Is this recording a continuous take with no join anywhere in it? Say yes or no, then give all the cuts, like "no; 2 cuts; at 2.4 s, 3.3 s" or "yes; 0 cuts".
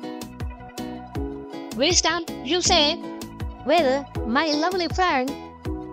no; 1 cut; at 1.4 s